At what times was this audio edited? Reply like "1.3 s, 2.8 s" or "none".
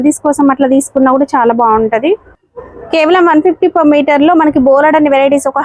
none